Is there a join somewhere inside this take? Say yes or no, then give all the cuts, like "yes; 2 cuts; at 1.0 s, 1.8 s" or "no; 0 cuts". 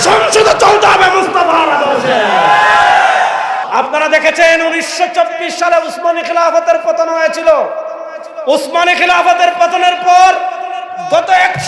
yes; 1 cut; at 3.6 s